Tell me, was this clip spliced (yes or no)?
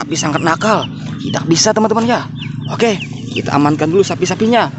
no